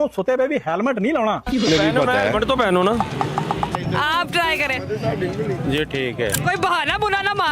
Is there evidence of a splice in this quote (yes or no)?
yes